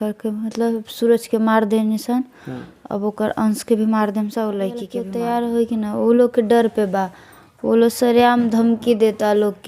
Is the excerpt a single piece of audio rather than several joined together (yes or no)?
no